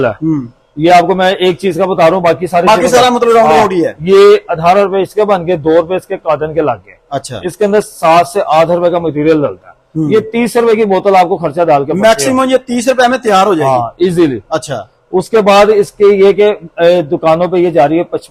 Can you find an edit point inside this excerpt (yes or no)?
no